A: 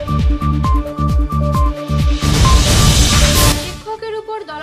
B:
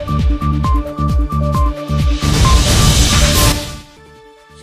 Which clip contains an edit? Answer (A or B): A